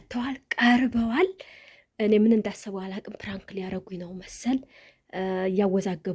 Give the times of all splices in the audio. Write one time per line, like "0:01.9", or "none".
none